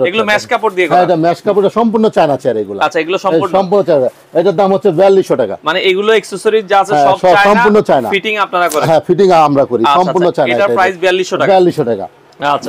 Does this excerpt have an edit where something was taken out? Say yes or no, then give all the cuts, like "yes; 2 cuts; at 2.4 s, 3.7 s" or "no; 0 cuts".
no; 0 cuts